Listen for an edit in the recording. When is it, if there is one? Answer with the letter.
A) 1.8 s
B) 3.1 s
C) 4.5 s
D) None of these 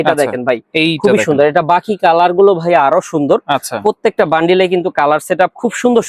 D